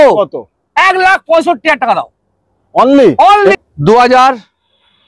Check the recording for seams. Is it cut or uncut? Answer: cut